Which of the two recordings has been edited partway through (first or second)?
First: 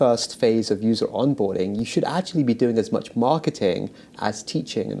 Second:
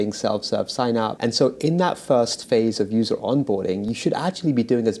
second